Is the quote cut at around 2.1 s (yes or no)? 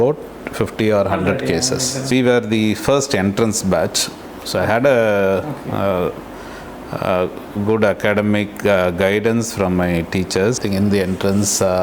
yes